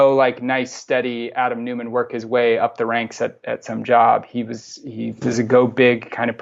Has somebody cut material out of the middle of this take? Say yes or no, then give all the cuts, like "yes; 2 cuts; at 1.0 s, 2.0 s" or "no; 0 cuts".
no; 0 cuts